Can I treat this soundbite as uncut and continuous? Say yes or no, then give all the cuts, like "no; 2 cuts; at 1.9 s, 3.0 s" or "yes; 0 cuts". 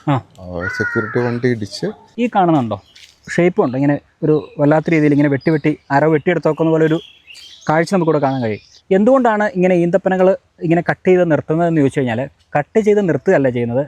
no; 1 cut; at 2.1 s